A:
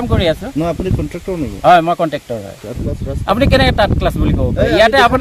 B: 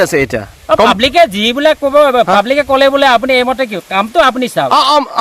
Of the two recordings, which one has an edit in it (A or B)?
A